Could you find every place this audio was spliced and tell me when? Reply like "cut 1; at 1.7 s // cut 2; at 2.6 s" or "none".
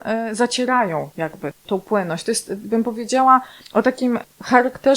cut 1; at 1.5 s // cut 2; at 4.0 s